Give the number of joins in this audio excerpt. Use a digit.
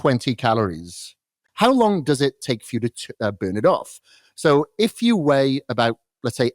1